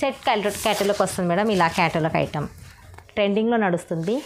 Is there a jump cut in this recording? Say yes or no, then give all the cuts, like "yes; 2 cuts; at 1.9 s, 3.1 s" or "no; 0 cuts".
yes; 1 cut; at 2.9 s